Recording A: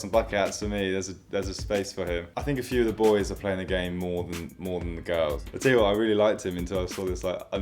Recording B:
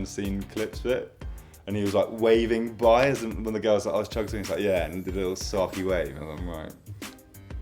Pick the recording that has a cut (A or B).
A